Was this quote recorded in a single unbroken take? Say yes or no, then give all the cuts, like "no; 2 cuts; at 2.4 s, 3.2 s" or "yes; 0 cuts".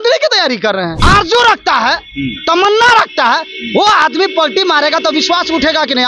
no; 1 cut; at 0.9 s